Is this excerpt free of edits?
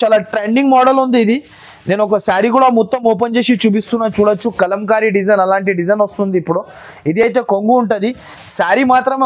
yes; 0 cuts

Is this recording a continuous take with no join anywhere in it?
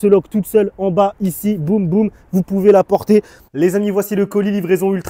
no; 1 cut; at 3.4 s

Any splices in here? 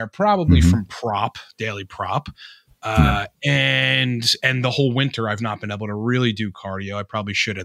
no; 0 cuts

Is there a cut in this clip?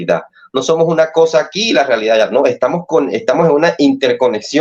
no; 0 cuts

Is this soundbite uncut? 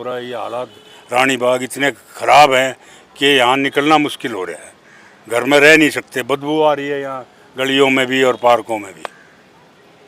yes; 0 cuts

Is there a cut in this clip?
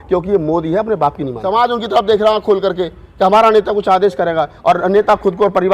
yes; 1 cut; at 1.3 s

